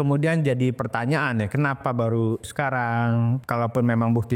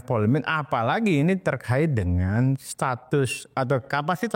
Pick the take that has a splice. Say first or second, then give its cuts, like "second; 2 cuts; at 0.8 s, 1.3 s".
first; 2 cuts; at 2.4 s, 3.4 s